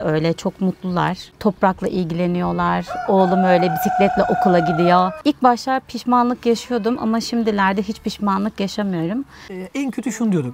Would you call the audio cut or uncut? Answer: cut